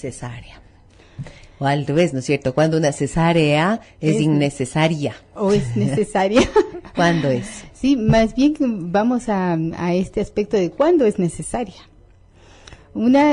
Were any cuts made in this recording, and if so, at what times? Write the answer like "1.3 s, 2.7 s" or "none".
6.4 s